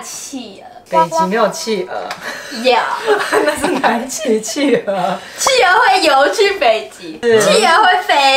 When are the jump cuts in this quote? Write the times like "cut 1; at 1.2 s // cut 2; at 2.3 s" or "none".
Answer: none